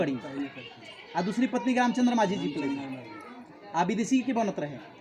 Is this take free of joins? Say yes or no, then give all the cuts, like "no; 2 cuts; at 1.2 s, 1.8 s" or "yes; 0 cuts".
yes; 0 cuts